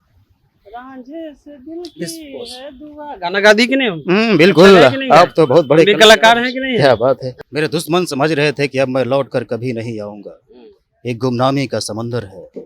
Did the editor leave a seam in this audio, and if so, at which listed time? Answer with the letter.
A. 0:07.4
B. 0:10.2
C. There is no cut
A